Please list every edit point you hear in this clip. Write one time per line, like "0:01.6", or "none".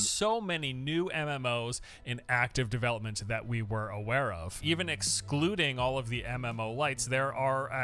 0:04.2